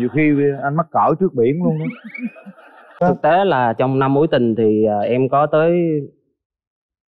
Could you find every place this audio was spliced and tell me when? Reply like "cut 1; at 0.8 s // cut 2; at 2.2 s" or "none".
cut 1; at 2.8 s